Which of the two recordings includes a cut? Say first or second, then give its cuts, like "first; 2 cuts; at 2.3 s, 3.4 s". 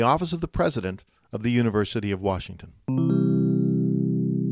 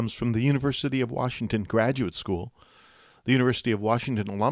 first; 1 cut; at 3.0 s